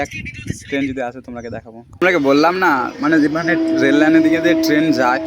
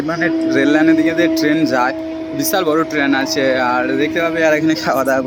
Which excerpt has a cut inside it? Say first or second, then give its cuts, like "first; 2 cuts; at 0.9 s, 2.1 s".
first; 1 cut; at 2.0 s